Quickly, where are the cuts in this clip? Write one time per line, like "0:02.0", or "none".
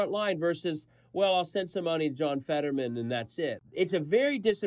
0:03.6